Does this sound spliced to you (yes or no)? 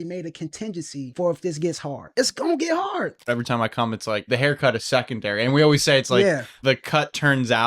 yes